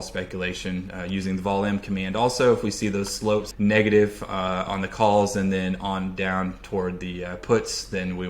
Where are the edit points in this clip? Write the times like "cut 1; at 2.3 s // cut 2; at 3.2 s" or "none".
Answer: cut 1; at 3.5 s